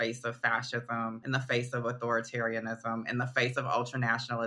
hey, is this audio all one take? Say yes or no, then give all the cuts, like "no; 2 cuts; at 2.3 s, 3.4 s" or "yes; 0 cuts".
no; 1 cut; at 1.2 s